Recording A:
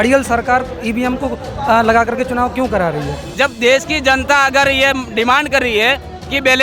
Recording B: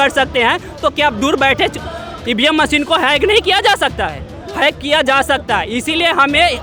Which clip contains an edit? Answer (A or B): A